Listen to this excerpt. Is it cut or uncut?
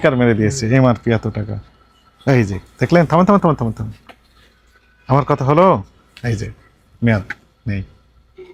uncut